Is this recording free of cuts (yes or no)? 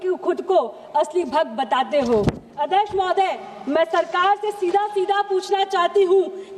yes